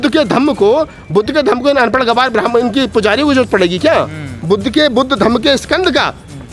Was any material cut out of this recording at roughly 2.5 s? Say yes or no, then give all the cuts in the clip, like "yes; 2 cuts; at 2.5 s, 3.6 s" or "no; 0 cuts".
no; 1 cut; at 4.4 s